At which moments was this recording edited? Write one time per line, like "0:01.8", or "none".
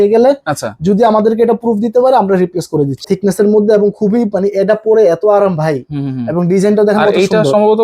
0:03.1